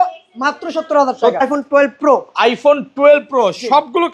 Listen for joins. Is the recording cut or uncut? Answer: cut